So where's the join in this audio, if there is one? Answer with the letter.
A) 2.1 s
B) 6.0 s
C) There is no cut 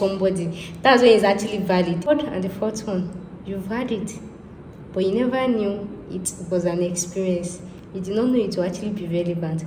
A